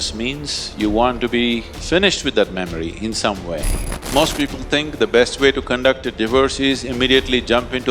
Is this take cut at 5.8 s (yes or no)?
no